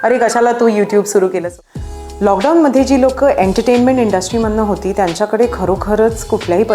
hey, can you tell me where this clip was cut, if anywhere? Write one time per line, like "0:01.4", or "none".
0:01.5